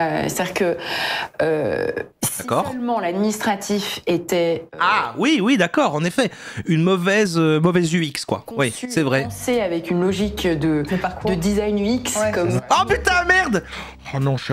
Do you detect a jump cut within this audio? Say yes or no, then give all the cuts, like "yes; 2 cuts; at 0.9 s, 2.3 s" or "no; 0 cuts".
no; 0 cuts